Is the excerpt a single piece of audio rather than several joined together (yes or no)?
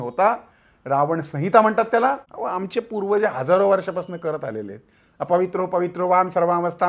no